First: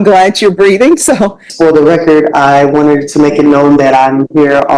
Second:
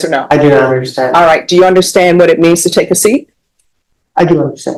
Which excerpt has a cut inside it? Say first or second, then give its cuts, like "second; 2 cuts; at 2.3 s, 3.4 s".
first; 1 cut; at 1.5 s